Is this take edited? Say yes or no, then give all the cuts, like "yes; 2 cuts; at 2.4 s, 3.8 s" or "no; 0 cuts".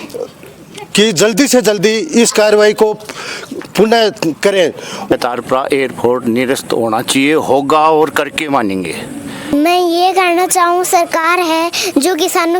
yes; 2 cuts; at 5.1 s, 9.5 s